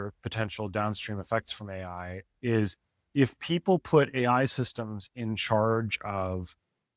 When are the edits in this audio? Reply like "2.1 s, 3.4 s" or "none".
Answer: none